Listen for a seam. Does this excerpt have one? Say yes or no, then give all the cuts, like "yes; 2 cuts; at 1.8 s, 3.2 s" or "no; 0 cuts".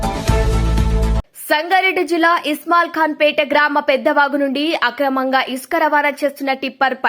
yes; 1 cut; at 1.3 s